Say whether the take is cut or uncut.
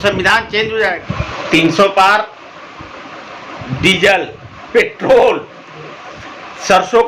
cut